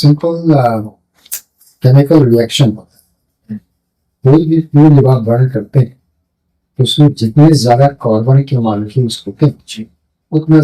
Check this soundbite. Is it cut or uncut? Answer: uncut